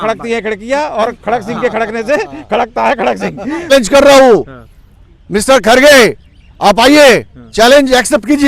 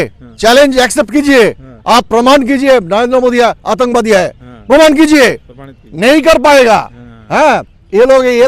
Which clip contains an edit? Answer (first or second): first